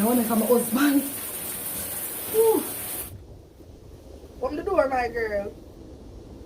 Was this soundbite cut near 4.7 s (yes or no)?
yes